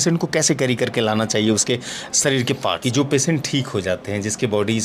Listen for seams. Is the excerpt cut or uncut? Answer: cut